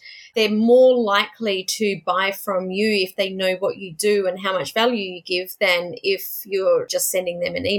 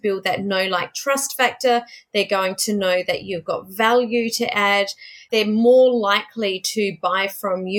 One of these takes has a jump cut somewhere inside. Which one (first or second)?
first